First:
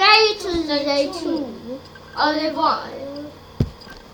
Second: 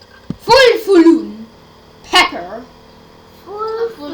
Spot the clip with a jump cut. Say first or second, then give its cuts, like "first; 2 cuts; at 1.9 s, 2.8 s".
second; 1 cut; at 2.5 s